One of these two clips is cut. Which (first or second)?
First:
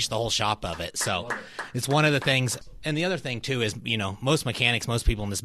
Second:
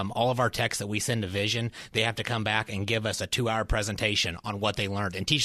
first